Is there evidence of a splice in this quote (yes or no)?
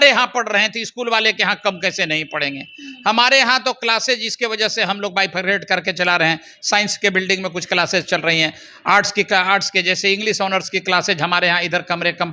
no